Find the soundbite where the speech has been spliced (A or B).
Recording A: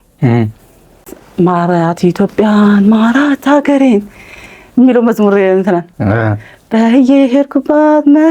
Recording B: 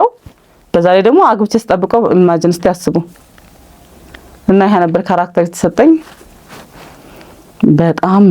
A